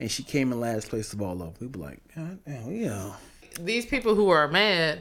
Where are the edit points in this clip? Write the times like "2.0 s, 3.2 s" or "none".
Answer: 3.5 s